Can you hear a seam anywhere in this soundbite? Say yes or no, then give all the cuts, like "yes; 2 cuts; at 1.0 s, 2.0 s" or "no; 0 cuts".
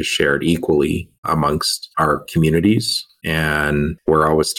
yes; 2 cuts; at 1.4 s, 3.4 s